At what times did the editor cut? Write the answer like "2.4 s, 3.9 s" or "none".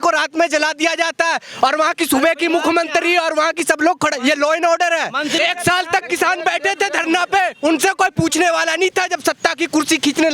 5.4 s